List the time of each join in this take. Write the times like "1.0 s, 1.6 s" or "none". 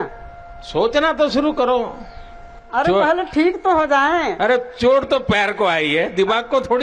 none